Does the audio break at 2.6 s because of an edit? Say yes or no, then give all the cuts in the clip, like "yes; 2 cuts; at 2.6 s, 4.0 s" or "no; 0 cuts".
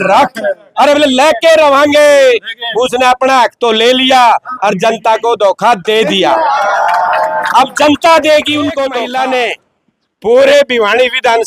no; 1 cut; at 8.9 s